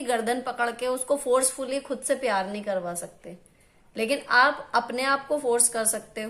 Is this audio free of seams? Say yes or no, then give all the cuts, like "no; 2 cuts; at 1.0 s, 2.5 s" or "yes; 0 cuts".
yes; 0 cuts